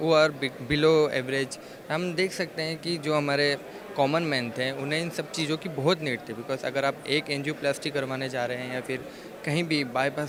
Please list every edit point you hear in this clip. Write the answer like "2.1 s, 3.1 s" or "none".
none